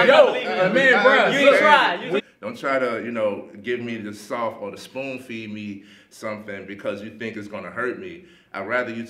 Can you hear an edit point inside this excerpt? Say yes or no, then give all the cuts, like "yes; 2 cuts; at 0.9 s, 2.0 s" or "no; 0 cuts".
yes; 1 cut; at 2.2 s